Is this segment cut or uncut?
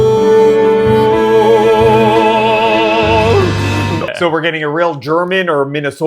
cut